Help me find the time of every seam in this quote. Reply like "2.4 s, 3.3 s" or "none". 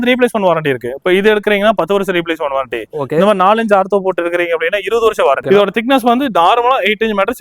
5.4 s